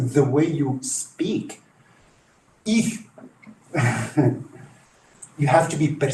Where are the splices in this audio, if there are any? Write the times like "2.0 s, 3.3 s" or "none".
none